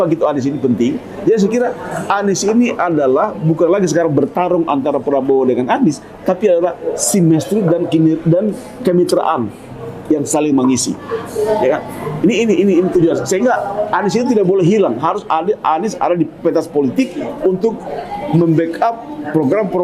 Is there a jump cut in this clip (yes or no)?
no